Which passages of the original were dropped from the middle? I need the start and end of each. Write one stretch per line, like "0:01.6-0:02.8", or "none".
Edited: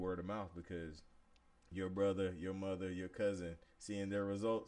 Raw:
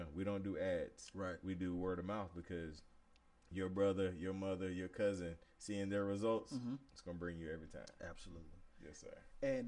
none